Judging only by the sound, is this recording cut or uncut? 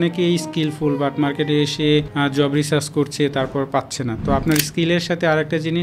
cut